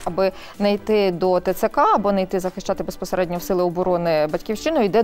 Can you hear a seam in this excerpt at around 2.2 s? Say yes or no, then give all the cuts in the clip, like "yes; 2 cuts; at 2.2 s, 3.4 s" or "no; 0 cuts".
no; 0 cuts